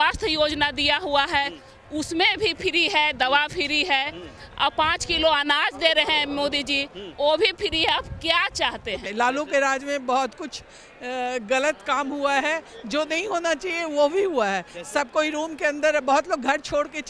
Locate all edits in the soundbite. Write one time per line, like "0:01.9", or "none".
0:09.0